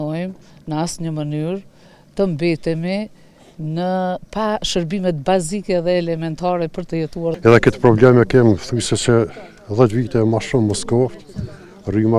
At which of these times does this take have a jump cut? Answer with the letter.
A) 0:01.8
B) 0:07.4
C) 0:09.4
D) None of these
B